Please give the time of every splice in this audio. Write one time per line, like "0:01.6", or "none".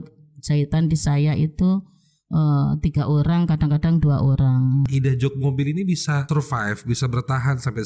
0:04.9
0:06.2